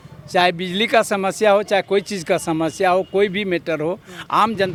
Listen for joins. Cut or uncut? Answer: uncut